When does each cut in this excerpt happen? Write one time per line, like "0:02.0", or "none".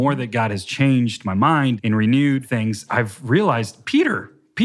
0:01.8
0:02.8
0:03.8